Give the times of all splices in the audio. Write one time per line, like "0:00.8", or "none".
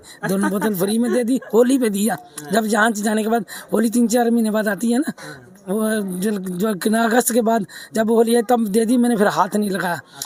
none